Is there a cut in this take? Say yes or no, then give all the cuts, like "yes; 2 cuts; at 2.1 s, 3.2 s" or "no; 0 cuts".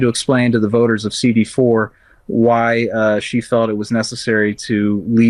no; 0 cuts